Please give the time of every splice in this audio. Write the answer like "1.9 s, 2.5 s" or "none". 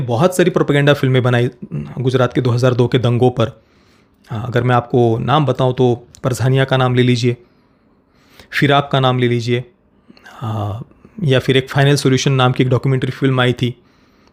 none